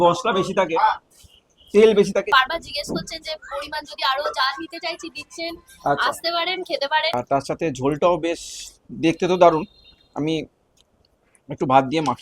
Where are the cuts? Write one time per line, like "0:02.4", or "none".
0:02.3
0:07.1